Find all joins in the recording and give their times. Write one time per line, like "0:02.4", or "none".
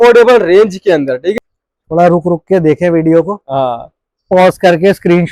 0:01.3